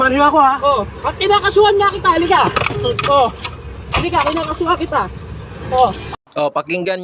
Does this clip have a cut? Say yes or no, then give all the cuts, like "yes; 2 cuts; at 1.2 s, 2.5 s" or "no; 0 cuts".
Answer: no; 0 cuts